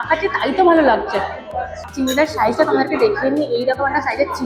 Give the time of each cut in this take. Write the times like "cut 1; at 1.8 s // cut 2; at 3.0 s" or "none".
cut 1; at 1.9 s